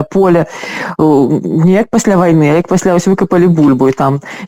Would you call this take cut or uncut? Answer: uncut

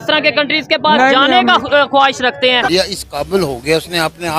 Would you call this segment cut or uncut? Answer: cut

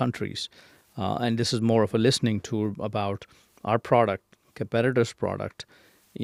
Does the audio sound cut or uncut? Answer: uncut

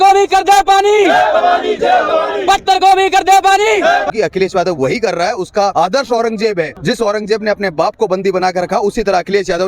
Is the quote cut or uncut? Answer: cut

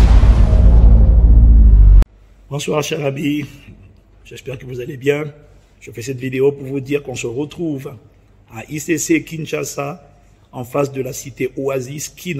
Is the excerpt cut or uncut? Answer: cut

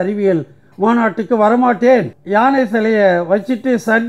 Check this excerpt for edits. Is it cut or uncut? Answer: cut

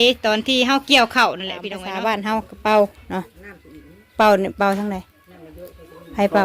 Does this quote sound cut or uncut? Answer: cut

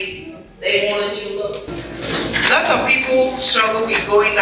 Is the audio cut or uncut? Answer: cut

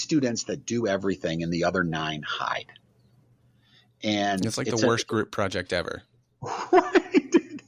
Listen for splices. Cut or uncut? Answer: uncut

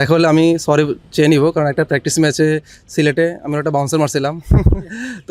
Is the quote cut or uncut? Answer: uncut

